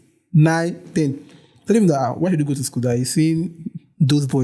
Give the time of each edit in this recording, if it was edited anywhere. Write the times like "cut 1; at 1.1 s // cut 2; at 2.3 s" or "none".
none